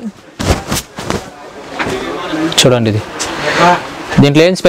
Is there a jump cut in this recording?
no; 0 cuts

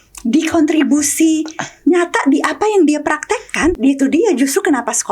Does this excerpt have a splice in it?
yes; 1 cut; at 3.8 s

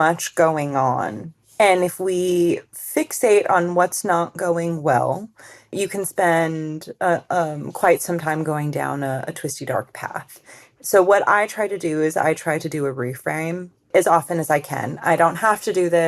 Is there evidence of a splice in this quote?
yes; 2 cuts; at 5.7 s, 13.9 s

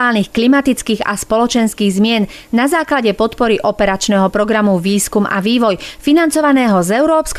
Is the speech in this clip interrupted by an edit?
no; 0 cuts

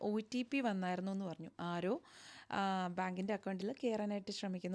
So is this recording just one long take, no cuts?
yes; 0 cuts

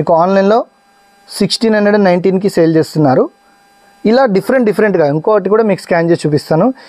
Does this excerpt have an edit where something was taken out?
no; 0 cuts

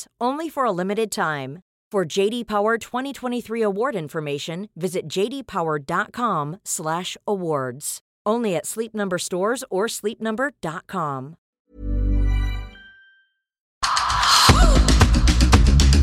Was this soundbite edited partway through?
yes; 1 cut; at 13.8 s

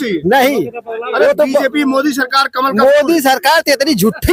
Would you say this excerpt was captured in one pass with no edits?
yes; 0 cuts

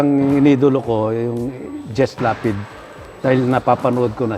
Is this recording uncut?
yes; 0 cuts

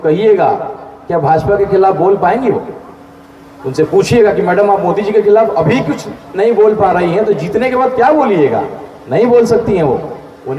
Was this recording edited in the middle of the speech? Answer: no; 0 cuts

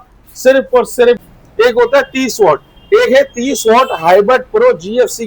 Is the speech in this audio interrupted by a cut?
yes; 1 cut; at 1.2 s

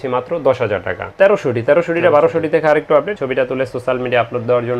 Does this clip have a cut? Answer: yes; 2 cuts; at 1.0 s, 3.1 s

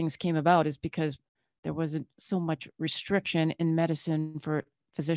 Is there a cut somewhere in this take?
no; 0 cuts

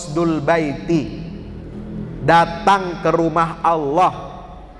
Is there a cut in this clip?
no; 0 cuts

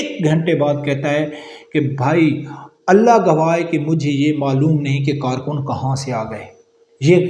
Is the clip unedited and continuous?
yes; 0 cuts

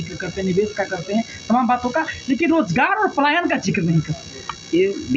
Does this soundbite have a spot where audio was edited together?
no; 0 cuts

